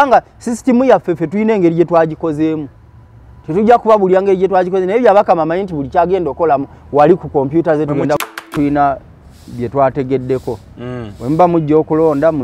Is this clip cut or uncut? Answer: cut